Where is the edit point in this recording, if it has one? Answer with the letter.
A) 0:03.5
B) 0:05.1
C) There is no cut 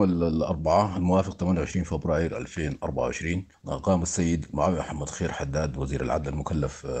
A